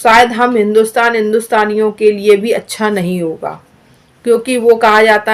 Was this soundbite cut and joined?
no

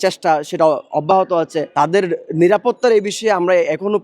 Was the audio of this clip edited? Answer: yes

